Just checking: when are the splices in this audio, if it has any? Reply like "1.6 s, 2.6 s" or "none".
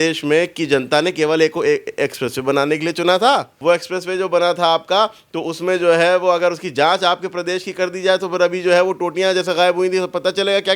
3.5 s